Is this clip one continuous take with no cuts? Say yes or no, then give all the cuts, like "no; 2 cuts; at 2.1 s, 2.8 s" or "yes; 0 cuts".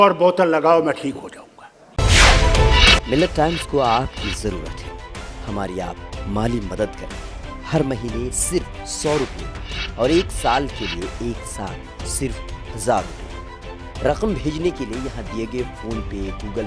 no; 1 cut; at 1.9 s